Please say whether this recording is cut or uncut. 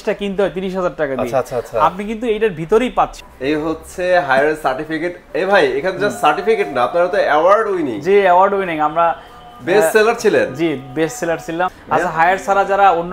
cut